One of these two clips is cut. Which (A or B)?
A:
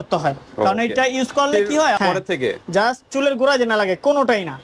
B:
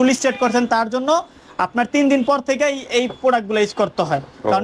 A